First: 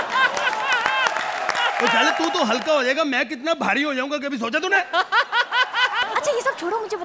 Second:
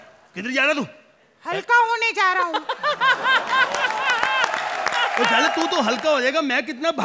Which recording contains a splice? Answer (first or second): first